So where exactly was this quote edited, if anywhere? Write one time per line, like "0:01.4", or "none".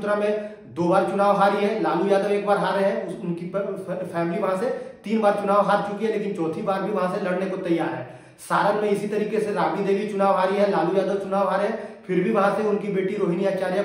none